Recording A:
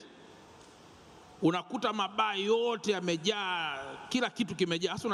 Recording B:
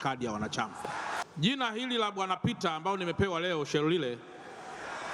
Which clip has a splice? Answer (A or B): B